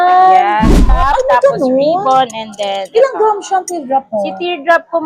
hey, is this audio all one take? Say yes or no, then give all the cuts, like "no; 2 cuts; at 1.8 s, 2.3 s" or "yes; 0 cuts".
no; 1 cut; at 1.0 s